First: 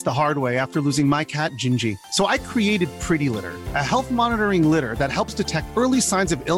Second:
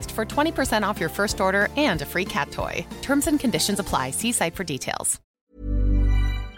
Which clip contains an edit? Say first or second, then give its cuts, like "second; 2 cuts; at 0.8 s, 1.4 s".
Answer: second; 1 cut; at 5.3 s